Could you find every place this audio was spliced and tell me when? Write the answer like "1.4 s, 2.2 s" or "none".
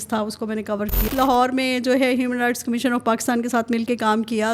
1.1 s